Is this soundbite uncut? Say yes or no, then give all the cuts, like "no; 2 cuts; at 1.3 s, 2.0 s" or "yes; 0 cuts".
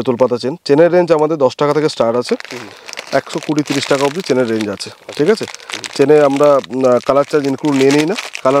yes; 0 cuts